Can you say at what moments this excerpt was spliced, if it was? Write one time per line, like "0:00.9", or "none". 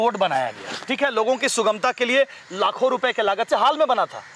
none